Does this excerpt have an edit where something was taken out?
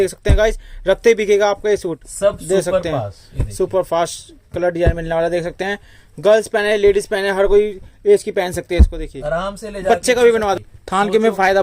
yes; 2 cuts; at 2.1 s, 10.6 s

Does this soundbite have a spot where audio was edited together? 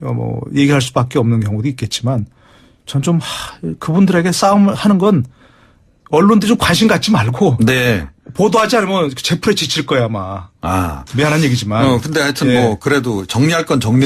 yes; 1 cut; at 5.0 s

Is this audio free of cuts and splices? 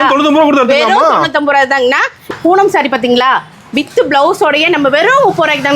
no; 1 cut; at 2.2 s

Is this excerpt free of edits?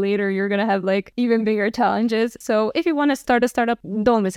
no; 1 cut; at 3.2 s

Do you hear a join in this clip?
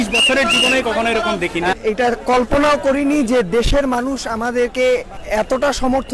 yes; 2 cuts; at 1.8 s, 5.2 s

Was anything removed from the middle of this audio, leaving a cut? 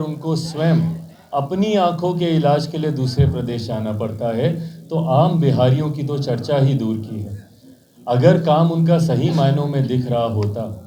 no; 0 cuts

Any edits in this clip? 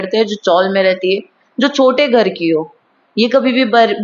no; 0 cuts

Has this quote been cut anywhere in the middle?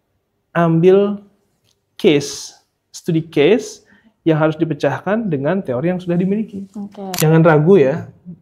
yes; 1 cut; at 7.2 s

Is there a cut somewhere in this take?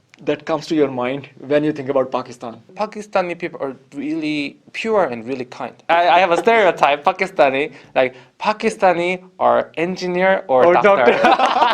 yes; 2 cuts; at 2.7 s, 5.8 s

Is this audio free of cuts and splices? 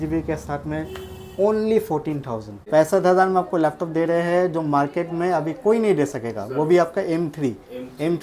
no; 1 cut; at 2.6 s

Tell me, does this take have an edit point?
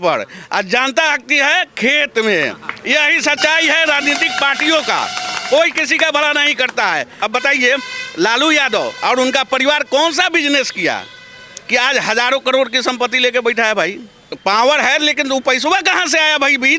yes; 2 cuts; at 7.1 s, 14.3 s

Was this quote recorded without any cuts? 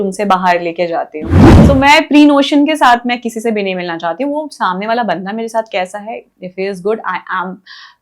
no; 1 cut; at 1.5 s

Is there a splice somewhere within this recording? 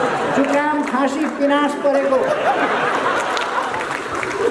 no; 0 cuts

